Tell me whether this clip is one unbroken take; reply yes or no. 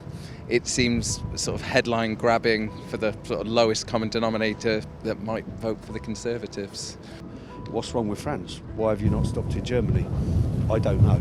no